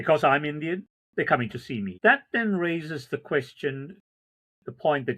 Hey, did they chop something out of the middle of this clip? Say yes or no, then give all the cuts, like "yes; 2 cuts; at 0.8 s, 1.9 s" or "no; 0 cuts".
yes; 1 cut; at 1.9 s